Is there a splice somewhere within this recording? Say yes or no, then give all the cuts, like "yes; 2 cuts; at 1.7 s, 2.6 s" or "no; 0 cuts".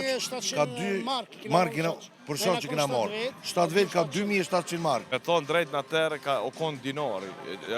yes; 1 cut; at 5.1 s